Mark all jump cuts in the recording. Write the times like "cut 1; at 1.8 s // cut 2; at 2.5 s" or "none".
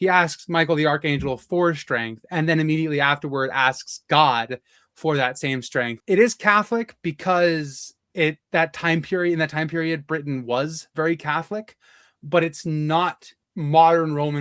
cut 1; at 6.0 s // cut 2; at 13.5 s